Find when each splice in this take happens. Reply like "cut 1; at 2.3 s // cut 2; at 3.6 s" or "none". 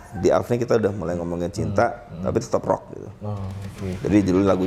none